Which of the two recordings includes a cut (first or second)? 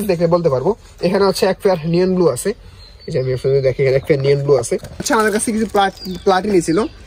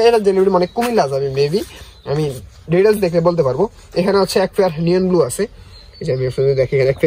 first